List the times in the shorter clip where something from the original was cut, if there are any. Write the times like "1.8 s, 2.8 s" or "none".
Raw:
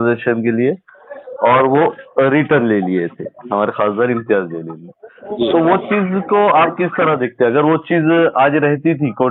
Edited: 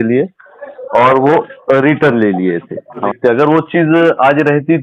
3.1 s